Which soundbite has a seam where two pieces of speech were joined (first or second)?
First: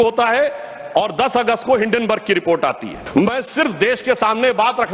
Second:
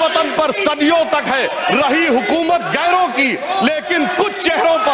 first